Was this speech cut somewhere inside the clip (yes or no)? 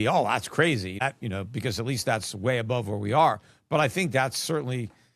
yes